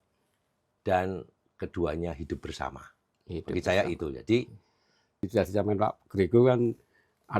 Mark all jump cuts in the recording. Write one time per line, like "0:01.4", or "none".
0:05.3

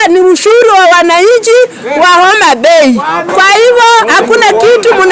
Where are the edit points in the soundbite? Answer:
none

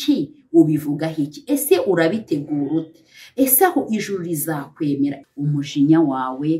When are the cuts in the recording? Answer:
0:05.2

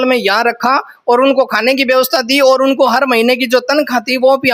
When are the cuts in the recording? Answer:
none

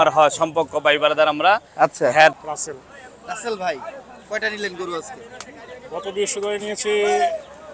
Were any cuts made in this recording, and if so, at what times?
0:02.4

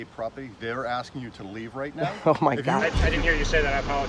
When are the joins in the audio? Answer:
0:02.8

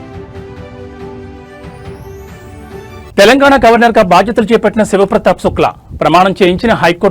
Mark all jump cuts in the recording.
0:03.0

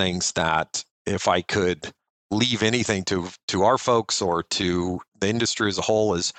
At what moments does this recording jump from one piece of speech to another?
0:05.1

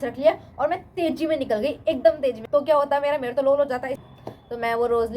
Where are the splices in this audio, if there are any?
0:02.4
0:04.0

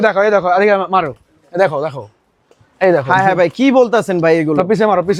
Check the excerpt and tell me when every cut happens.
none

